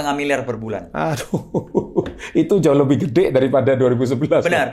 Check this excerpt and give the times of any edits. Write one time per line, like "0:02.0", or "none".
none